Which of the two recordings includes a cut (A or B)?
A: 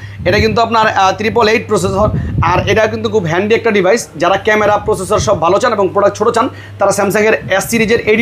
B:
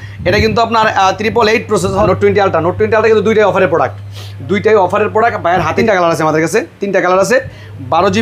B